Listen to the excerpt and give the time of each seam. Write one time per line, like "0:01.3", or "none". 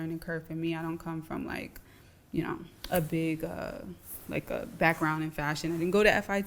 none

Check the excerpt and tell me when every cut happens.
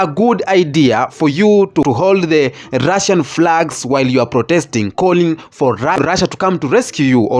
0:01.8
0:06.2

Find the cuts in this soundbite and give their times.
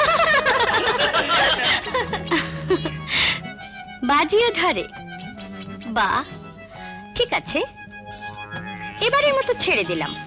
none

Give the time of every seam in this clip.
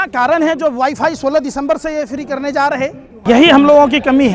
0:03.3

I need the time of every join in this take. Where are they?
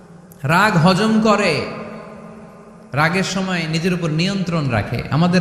none

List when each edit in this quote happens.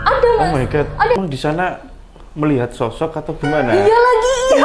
0:01.2

